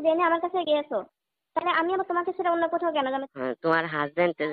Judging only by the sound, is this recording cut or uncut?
cut